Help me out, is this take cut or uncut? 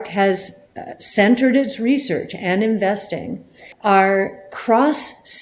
cut